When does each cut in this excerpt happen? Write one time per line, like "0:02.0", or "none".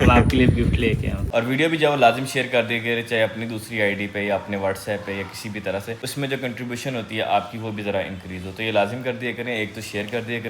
0:01.2
0:05.9

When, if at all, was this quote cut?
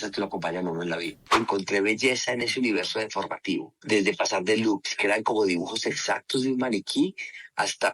0:01.2
0:03.7

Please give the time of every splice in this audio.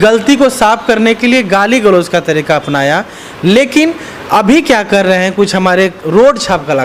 none

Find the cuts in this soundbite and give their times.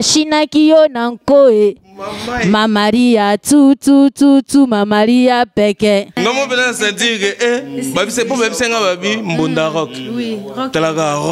0:06.2

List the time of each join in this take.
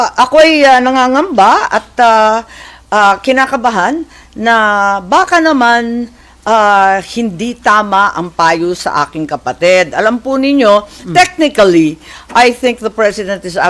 none

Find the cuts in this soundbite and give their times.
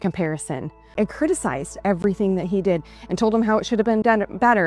0:00.9

